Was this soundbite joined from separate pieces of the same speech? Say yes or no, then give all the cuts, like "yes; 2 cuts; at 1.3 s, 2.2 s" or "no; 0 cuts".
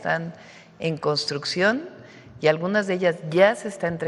no; 0 cuts